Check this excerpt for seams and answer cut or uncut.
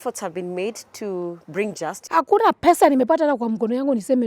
cut